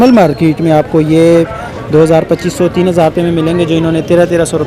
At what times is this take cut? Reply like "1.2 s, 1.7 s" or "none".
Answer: none

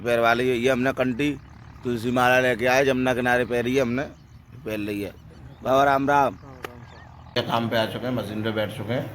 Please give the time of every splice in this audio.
7.4 s

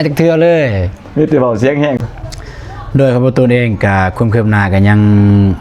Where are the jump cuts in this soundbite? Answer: 2.0 s

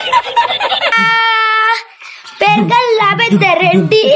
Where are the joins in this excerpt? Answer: 0.9 s

